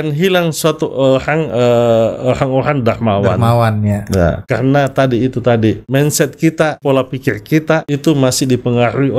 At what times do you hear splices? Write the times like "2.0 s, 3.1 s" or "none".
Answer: 4.4 s, 5.8 s, 6.8 s, 7.9 s